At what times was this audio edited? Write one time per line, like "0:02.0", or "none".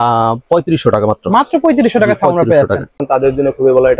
0:02.9

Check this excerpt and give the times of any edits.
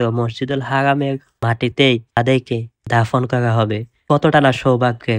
0:01.3
0:02.4
0:03.9

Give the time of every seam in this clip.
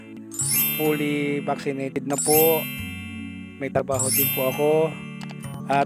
none

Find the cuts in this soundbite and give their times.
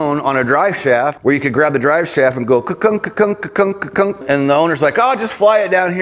0:01.2
0:04.2

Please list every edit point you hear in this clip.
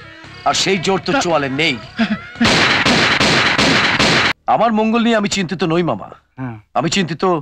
0:04.3

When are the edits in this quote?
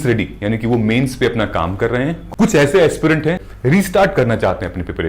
0:02.2
0:03.4

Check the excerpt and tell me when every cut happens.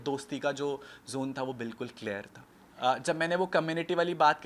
none

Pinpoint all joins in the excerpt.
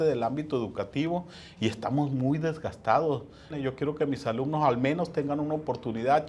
0:03.6

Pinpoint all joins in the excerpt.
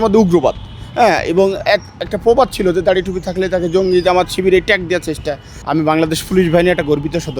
0:05.5

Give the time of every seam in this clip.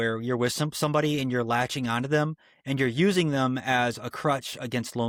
none

